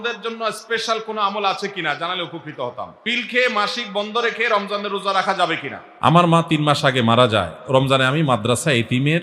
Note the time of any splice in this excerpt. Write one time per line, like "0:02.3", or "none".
0:02.9
0:06.1